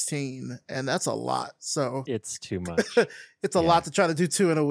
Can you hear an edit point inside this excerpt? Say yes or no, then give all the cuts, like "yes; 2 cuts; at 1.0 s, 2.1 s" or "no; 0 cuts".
no; 0 cuts